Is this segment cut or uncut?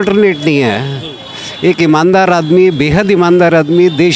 uncut